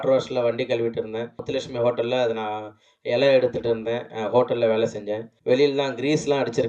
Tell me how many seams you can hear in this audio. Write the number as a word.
two